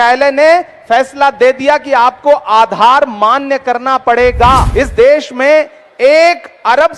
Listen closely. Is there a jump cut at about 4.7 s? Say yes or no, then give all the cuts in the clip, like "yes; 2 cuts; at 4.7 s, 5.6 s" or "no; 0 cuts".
yes; 1 cut; at 4.7 s